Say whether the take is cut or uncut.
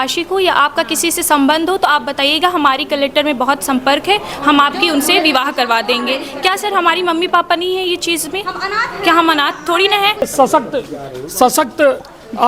cut